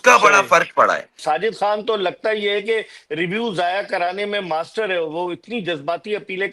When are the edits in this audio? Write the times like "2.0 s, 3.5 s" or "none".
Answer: 1.2 s

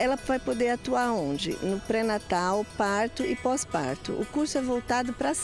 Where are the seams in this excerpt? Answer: none

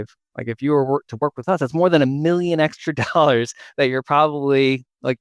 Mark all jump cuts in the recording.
none

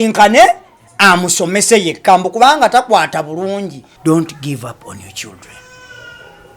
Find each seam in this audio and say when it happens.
3.8 s

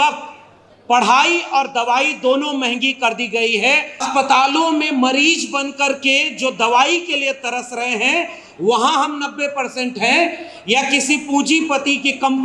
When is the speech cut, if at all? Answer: 4.0 s

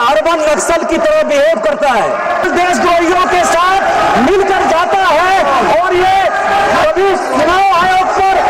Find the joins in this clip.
2.5 s

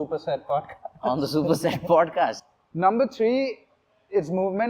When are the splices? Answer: 2.4 s

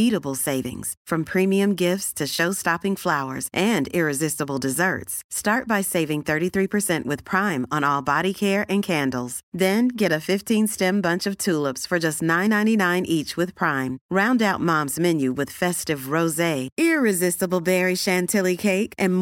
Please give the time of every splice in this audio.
none

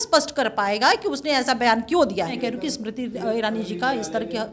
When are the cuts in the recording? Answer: 2.4 s

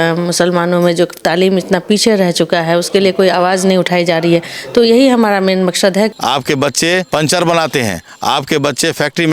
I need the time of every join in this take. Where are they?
6.1 s, 7.1 s

